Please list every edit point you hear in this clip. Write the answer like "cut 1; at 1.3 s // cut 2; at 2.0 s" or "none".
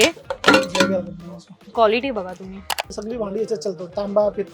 cut 1; at 3.0 s